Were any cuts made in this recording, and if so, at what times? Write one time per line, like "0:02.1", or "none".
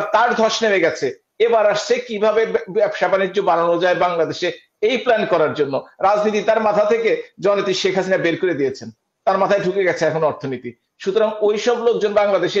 none

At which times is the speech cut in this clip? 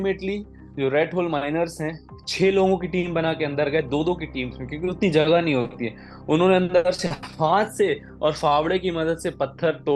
none

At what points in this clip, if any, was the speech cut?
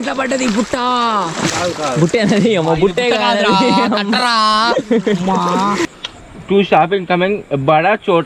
0:06.0

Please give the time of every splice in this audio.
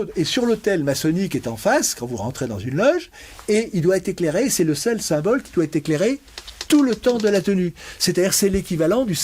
none

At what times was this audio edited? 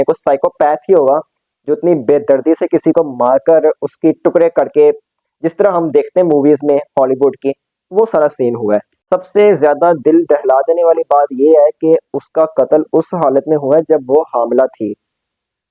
0:08.9

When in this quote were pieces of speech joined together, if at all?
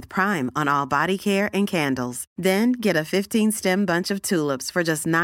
none

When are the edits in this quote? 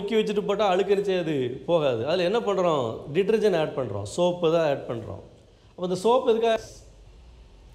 0:06.6

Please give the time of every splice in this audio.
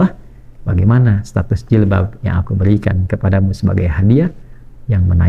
none

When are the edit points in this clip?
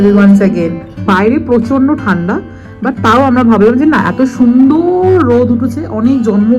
0:01.1

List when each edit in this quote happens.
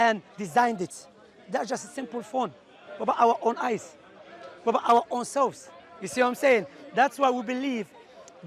none

